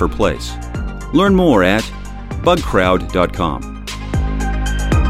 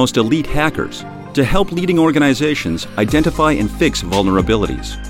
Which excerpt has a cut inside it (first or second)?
first